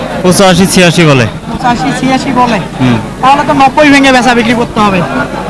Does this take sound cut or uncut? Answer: uncut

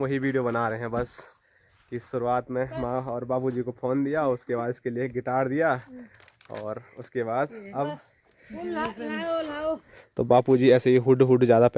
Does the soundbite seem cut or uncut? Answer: uncut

